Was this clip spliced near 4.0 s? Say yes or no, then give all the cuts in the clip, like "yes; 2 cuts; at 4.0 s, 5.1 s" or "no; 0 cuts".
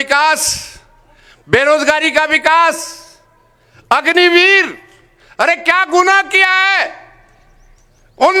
no; 0 cuts